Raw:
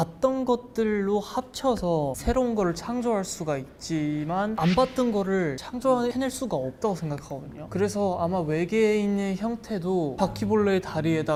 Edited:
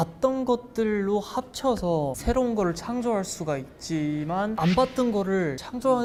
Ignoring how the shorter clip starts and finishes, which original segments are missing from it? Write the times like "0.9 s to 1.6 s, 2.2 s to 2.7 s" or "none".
none